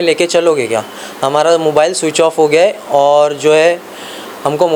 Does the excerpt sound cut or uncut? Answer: uncut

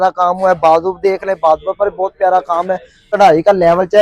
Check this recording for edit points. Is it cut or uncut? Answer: cut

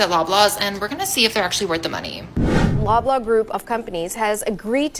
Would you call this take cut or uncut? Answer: cut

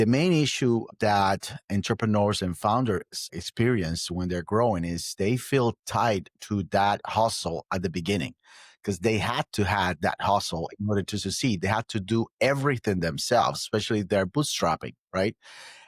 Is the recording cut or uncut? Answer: cut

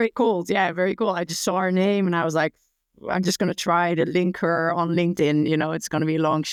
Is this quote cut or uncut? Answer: uncut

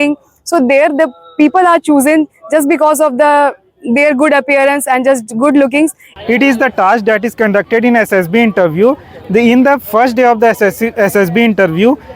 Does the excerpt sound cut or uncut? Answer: cut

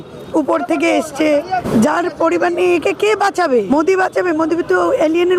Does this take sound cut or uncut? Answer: cut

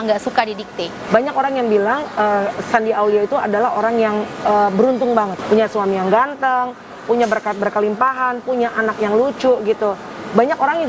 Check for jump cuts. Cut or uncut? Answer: cut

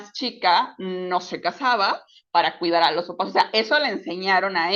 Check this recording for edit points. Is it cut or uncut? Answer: uncut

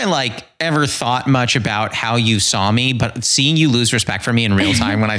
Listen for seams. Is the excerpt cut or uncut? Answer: uncut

